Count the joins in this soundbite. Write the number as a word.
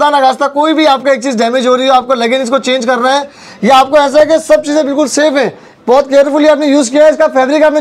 zero